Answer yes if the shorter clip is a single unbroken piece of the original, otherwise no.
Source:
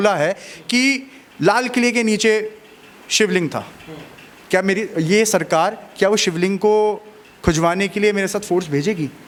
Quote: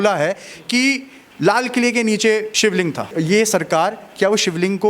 no